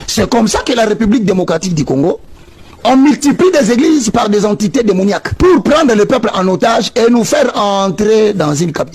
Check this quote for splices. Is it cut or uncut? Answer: cut